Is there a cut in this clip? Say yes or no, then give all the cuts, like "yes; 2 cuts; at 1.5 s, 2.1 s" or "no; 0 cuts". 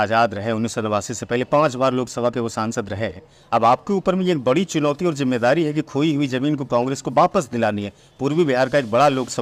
no; 0 cuts